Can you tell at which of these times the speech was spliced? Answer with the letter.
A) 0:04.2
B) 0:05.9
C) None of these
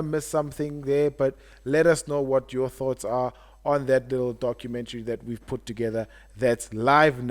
C